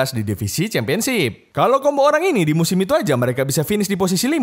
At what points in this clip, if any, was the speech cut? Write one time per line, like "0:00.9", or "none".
0:01.4